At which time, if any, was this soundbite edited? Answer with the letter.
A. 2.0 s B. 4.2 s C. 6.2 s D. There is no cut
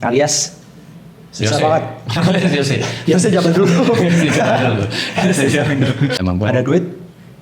C